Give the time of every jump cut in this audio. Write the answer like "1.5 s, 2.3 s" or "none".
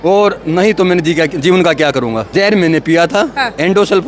2.3 s